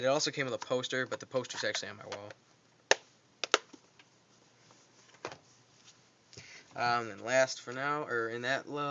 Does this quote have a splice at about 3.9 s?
no; 1 cut; at 7.1 s

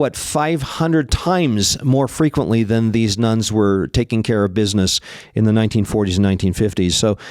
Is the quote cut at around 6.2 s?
no; 0 cuts

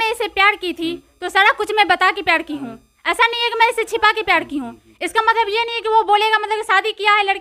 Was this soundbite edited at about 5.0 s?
no; 0 cuts

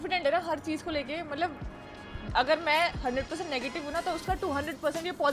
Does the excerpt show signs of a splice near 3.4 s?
no; 0 cuts

